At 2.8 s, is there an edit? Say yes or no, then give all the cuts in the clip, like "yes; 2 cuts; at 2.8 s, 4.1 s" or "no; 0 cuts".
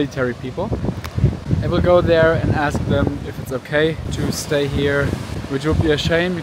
no; 3 cuts; at 1.4 s, 4.1 s, 5.3 s